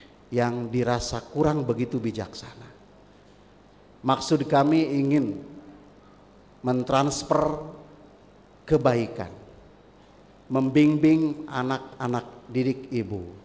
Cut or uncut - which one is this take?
uncut